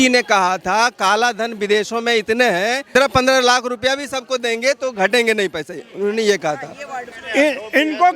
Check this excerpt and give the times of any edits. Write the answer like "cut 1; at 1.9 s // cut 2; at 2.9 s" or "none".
cut 1; at 2.9 s // cut 2; at 6.8 s